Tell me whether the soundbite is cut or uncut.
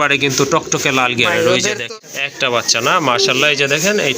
cut